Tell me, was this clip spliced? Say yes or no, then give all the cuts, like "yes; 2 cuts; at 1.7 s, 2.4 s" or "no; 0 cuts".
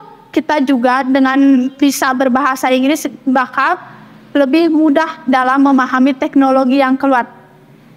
no; 0 cuts